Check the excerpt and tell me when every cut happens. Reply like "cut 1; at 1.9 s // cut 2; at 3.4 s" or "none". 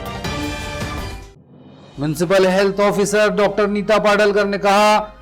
cut 1; at 1.2 s